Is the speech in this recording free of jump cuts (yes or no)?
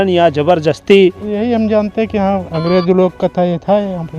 no